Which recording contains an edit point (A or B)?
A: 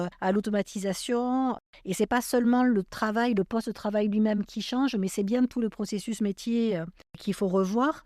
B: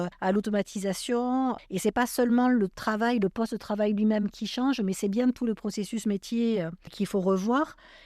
B